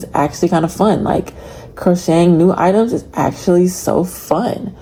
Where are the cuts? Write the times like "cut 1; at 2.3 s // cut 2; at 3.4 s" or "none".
none